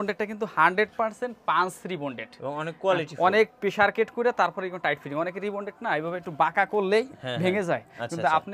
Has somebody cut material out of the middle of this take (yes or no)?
no